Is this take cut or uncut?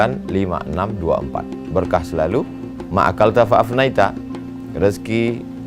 uncut